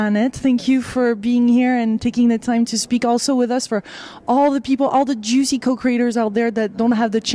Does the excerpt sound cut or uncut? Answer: uncut